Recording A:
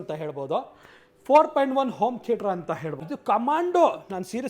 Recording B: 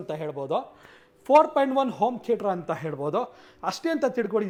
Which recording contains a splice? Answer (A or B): A